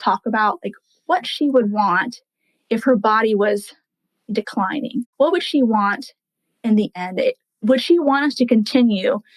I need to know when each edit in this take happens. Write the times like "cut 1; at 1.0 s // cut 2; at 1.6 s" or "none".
cut 1; at 5.1 s // cut 2; at 7.6 s